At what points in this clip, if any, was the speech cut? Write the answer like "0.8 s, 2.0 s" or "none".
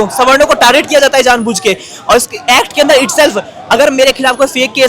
none